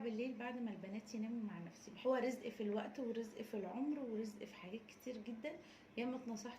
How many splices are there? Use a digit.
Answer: 1